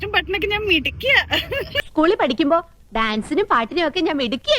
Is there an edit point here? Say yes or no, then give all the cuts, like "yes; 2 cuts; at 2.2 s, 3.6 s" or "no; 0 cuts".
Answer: yes; 1 cut; at 1.8 s